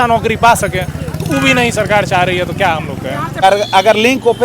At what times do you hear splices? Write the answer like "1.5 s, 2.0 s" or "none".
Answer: 3.4 s